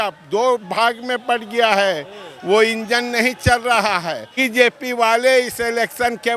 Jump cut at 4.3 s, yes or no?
yes